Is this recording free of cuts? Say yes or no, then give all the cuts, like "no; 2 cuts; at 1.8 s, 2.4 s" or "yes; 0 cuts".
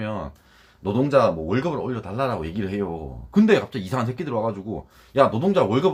yes; 0 cuts